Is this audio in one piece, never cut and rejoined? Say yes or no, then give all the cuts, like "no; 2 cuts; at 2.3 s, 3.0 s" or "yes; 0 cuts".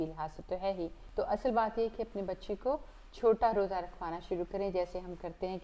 no; 1 cut; at 1.0 s